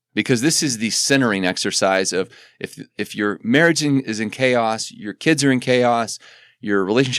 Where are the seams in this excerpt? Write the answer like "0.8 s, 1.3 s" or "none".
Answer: none